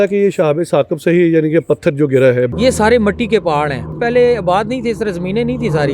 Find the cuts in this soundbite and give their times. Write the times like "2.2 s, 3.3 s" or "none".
2.5 s, 4.0 s